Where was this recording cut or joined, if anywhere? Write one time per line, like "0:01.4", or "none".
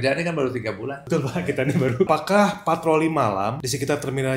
0:01.0
0:02.1
0:03.6